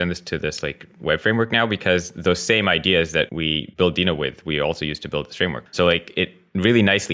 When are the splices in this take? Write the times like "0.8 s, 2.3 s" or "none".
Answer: 3.5 s, 5.6 s